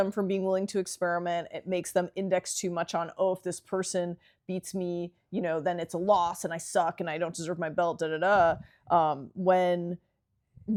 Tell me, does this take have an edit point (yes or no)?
no